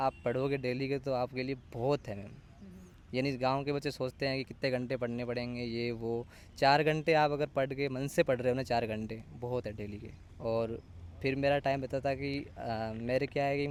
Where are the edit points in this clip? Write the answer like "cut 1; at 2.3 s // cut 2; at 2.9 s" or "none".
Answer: none